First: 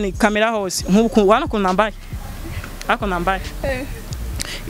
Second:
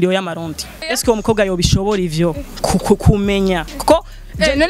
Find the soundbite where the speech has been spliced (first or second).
second